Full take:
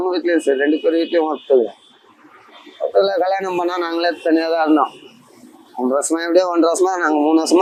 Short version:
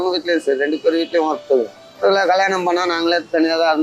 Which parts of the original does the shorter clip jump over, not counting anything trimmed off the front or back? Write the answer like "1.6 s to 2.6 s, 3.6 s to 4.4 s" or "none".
2.0 s to 2.9 s

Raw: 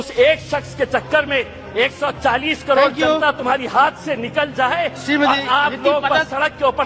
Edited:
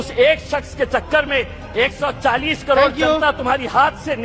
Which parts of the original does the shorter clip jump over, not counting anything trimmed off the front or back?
none

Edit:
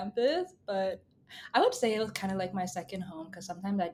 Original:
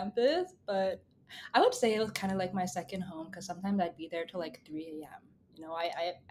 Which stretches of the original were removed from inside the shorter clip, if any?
none

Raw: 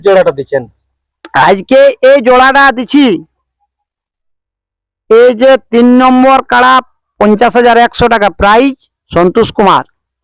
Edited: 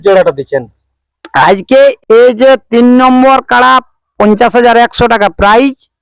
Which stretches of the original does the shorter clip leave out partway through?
2.0 s to 5.0 s

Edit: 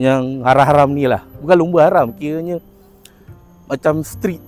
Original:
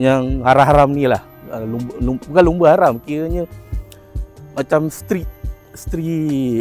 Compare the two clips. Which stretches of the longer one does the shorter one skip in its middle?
1.3 s to 2.2 s

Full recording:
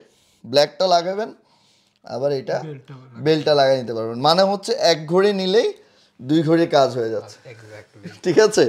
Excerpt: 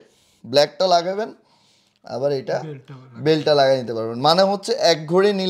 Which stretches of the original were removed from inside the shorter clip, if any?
none

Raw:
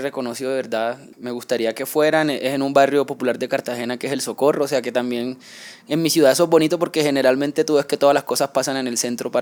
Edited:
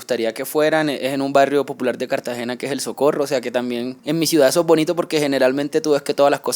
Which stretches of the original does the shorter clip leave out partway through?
5.4 s to 5.8 s

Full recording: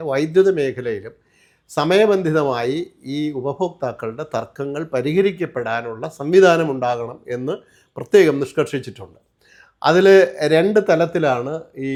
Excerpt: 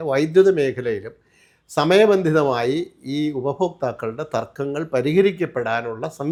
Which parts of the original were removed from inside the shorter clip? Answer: none

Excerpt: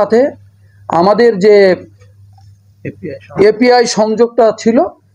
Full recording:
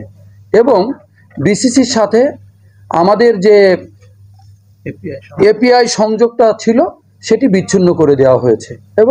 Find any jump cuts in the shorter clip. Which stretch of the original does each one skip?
none

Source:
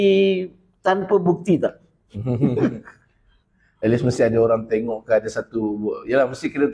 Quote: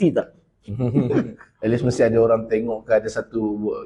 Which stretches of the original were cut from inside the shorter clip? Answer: 2.9 s to 3.6 s

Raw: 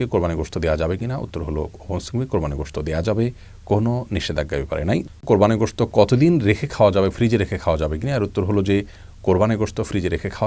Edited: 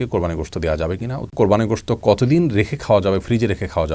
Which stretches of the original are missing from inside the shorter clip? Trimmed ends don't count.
1.2 s to 5.1 s

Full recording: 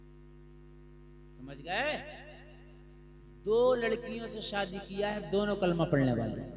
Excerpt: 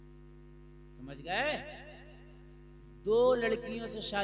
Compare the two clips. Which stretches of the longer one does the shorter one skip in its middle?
0.9 s to 1.3 s

